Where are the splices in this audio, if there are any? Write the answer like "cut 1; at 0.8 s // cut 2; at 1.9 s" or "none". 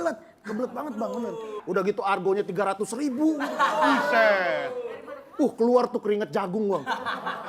cut 1; at 1.6 s